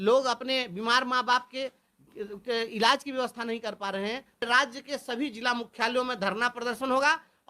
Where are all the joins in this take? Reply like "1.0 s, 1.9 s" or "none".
4.5 s